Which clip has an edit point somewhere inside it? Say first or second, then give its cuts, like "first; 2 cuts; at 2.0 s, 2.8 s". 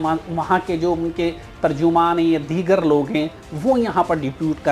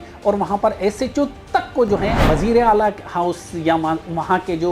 second; 1 cut; at 2.2 s